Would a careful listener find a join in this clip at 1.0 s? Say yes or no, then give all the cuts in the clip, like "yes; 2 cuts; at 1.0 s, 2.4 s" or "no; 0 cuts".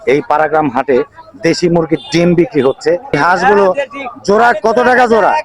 no; 1 cut; at 3.2 s